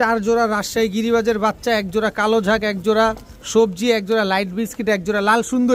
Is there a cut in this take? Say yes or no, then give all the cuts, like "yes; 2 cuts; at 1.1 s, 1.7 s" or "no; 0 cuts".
no; 0 cuts